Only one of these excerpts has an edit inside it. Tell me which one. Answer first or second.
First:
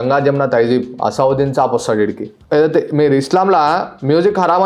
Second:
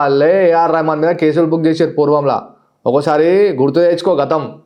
first